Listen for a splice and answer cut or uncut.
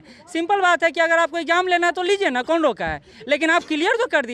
uncut